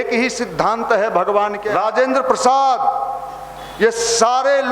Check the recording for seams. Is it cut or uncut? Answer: cut